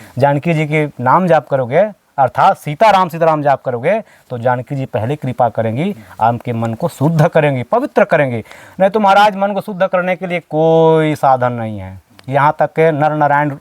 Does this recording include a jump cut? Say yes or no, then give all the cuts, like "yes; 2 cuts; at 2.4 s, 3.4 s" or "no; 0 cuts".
no; 0 cuts